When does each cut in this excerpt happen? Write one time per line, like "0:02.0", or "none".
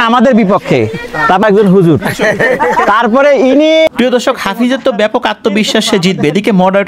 0:01.4
0:03.9